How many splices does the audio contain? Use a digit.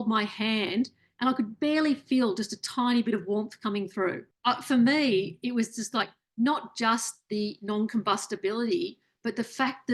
1